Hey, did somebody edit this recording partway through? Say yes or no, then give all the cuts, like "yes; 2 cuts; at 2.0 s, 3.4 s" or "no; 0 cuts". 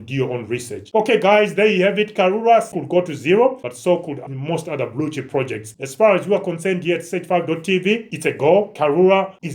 yes; 2 cuts; at 2.7 s, 4.2 s